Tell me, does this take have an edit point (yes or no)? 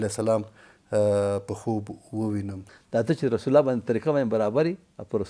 yes